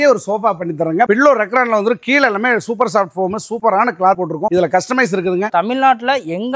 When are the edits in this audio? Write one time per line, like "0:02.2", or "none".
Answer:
0:01.1
0:05.5